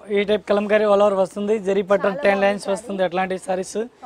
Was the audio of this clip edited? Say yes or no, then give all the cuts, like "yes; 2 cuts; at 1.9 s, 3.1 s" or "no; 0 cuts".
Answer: no; 0 cuts